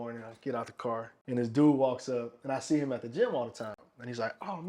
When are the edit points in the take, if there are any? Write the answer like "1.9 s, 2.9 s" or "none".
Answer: 1.1 s